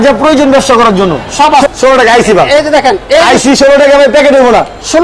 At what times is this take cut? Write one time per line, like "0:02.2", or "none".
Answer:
0:01.7